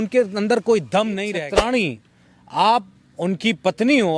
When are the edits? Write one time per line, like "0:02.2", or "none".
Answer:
0:01.3